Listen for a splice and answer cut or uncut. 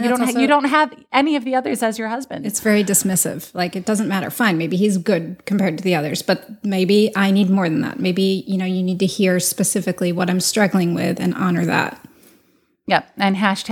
uncut